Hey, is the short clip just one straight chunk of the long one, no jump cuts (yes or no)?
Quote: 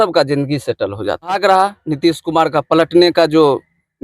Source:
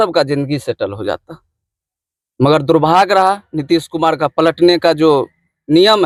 no